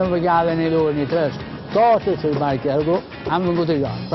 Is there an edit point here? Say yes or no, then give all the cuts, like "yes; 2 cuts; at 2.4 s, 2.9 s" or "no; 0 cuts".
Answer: no; 0 cuts